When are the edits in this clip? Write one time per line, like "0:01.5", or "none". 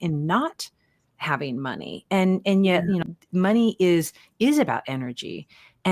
0:03.0